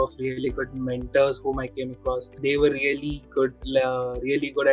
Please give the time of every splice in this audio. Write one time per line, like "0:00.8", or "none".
0:02.3